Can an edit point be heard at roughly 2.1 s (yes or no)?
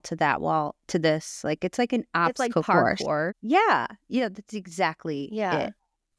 no